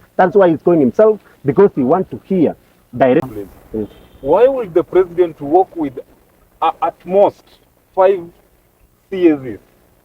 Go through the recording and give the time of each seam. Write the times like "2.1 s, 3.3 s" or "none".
3.3 s